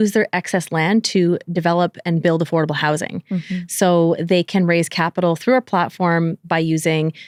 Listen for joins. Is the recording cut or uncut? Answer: uncut